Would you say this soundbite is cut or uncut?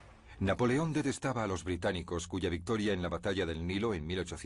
cut